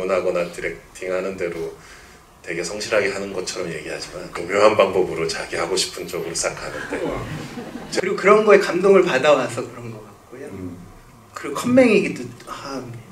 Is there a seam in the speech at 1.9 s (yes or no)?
no